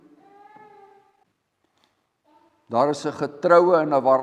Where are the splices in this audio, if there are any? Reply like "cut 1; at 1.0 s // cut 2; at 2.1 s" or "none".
cut 1; at 1.2 s